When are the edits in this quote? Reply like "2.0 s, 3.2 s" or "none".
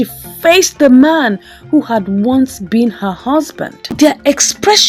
3.9 s